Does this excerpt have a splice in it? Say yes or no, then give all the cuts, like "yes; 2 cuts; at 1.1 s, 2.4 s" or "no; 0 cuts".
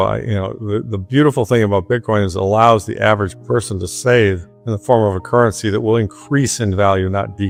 no; 0 cuts